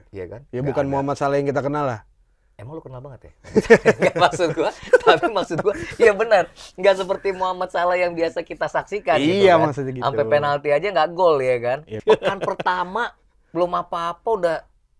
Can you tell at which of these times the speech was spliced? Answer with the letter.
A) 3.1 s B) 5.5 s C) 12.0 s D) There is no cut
C